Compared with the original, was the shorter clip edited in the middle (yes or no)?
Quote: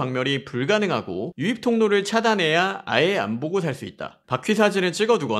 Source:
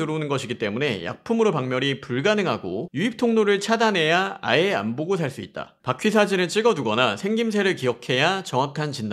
no